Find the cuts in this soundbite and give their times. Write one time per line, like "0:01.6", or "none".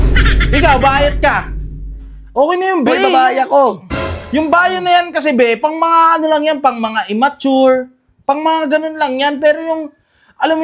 none